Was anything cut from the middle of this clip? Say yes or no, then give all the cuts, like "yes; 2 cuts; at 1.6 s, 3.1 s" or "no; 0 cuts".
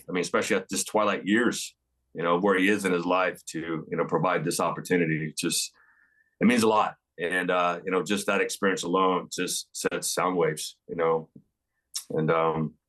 no; 0 cuts